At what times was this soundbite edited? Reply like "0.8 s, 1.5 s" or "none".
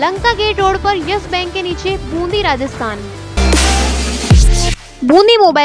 3.4 s